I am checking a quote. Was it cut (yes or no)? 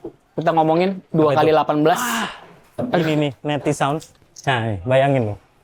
yes